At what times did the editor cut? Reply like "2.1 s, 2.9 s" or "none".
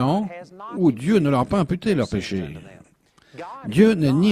1.0 s